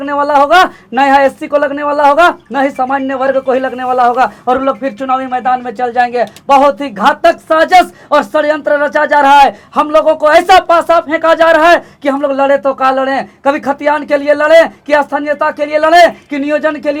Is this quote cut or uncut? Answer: uncut